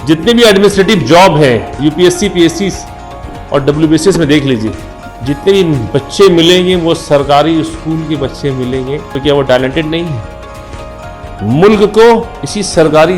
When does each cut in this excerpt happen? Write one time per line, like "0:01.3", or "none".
0:09.1